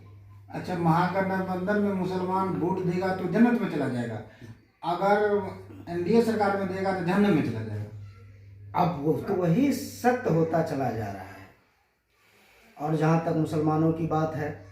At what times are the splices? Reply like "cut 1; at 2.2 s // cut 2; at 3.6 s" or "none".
cut 1; at 9.3 s

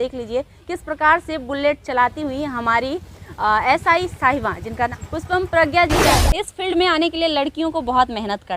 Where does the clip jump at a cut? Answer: cut 1; at 6.1 s

